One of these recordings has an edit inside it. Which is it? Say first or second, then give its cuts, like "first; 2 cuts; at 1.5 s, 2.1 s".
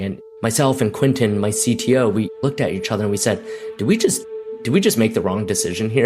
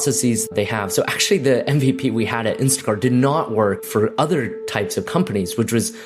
first; 1 cut; at 2.3 s